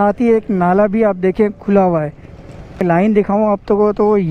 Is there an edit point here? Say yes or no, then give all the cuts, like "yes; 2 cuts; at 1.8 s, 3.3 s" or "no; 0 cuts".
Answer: yes; 1 cut; at 2.8 s